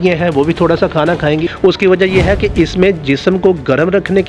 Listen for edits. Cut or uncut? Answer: cut